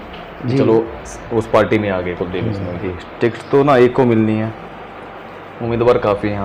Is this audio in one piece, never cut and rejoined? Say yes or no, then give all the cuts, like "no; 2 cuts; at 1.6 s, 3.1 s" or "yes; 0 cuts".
no; 1 cut; at 2.9 s